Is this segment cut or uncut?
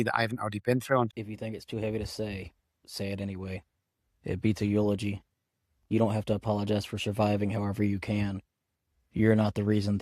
cut